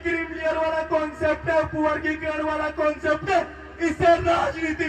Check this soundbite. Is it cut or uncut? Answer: uncut